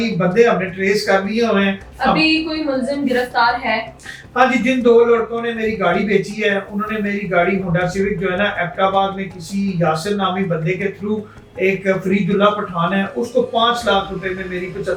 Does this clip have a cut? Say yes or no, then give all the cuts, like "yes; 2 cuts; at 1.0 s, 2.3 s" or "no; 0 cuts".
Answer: no; 0 cuts